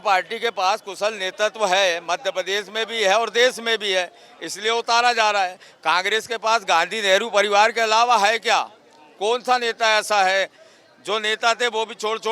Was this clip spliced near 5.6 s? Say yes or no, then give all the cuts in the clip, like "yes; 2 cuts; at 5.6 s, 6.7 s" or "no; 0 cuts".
no; 0 cuts